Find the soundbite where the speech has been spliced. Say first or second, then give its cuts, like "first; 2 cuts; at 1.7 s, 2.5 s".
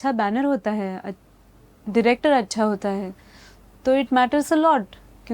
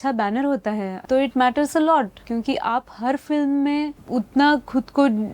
second; 3 cuts; at 0.9 s, 2.2 s, 4.0 s